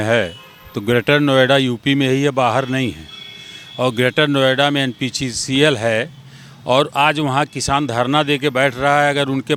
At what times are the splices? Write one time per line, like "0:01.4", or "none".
none